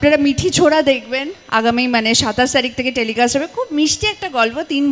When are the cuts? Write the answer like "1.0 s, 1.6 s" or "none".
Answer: none